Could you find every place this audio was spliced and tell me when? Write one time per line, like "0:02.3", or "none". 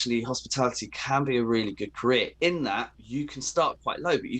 0:03.0

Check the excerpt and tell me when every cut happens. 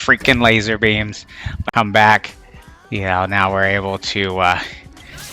0:01.6

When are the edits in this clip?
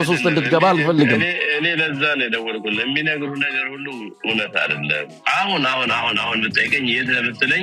0:05.2

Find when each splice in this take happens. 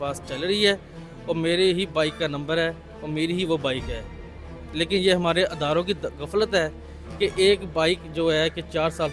none

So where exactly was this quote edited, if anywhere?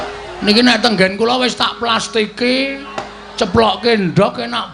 none

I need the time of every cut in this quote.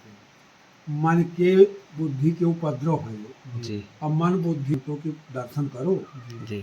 0:04.7

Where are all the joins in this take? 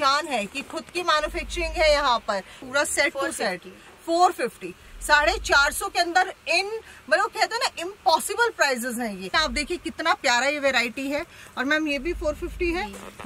0:02.6
0:09.3

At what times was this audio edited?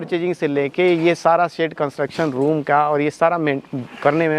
none

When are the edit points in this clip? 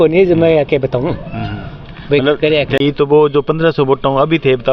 0:02.8

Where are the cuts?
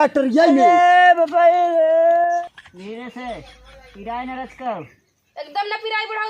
0:02.4

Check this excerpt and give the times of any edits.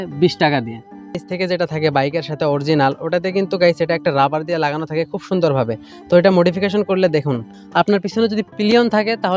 0:01.2
0:07.5

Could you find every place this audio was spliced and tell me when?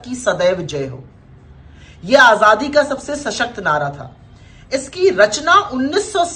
none

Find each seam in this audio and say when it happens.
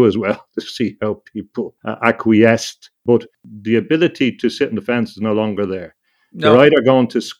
0:01.8
0:03.1

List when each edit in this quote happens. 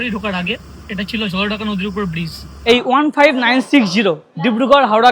0:02.5

